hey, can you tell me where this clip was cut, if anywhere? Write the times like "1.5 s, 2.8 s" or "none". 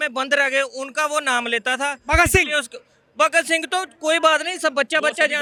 none